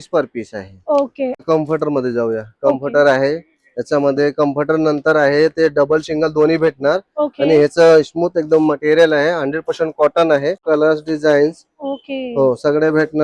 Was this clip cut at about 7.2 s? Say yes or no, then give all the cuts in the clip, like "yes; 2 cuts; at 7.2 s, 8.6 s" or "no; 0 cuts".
no; 2 cuts; at 1.4 s, 10.6 s